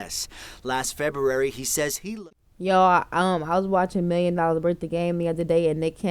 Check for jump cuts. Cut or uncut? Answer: cut